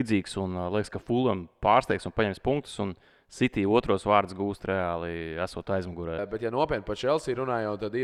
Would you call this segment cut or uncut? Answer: cut